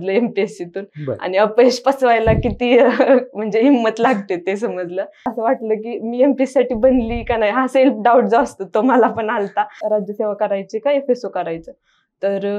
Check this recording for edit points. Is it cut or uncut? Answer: cut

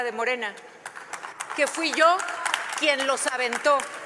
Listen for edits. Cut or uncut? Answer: uncut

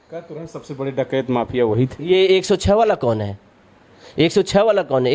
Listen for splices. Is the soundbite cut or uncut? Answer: uncut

